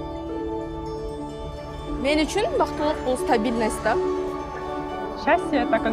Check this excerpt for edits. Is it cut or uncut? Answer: uncut